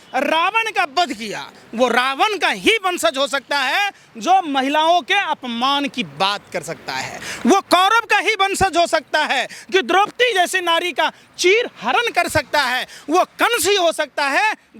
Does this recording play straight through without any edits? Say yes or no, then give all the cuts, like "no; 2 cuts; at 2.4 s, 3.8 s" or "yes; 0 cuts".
yes; 0 cuts